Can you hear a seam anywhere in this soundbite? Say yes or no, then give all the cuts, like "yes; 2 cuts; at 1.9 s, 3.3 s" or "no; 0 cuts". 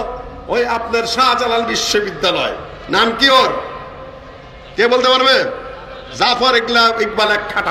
no; 0 cuts